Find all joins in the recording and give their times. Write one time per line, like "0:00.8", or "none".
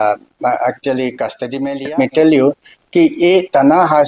0:01.9